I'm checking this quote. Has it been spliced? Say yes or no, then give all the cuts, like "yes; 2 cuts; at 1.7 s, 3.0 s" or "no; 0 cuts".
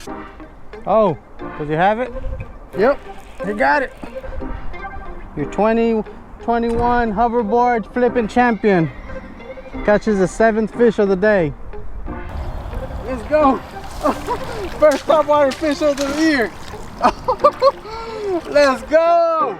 yes; 2 cuts; at 4.2 s, 12.3 s